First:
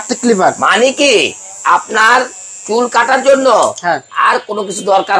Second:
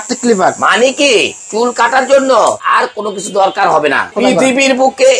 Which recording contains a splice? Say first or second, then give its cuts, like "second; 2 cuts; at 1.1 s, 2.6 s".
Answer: second; 3 cuts; at 1.4 s, 2.6 s, 4.1 s